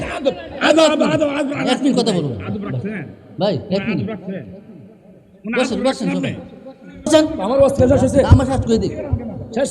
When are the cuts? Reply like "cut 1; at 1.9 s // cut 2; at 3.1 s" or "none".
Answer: cut 1; at 7.1 s